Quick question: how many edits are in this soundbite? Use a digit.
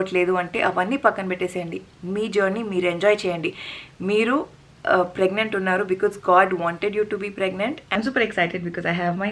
1